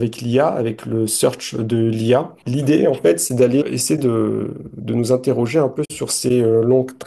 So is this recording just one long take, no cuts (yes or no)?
no